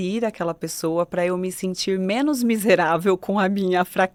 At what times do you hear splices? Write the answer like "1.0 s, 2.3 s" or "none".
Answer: none